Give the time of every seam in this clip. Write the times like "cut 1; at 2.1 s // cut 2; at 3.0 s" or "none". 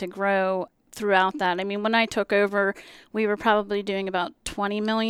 none